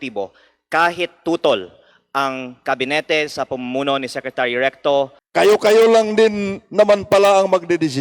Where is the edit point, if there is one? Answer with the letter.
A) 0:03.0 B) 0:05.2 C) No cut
B